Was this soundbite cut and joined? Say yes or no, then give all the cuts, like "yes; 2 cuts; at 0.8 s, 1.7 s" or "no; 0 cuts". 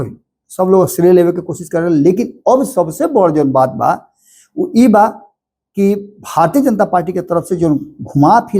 no; 0 cuts